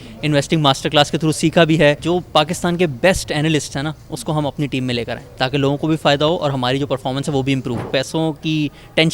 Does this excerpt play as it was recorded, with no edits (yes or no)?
no